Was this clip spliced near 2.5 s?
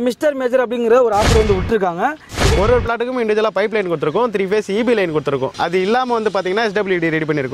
yes; 1 cut; at 2.5 s

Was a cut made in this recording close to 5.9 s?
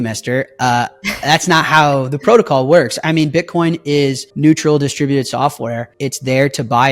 yes; 2 cuts; at 4.3 s, 5.9 s

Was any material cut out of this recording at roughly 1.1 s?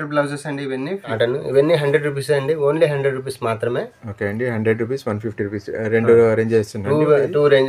yes; 1 cut; at 1.1 s

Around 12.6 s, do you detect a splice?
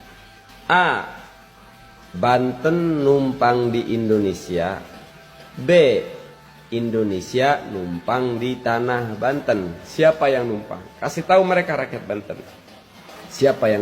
no; 1 cut; at 9.8 s

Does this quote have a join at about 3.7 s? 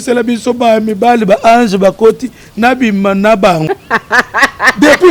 yes; 1 cut; at 3.7 s

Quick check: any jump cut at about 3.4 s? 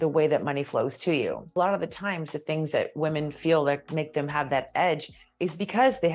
no; 1 cut; at 1.6 s

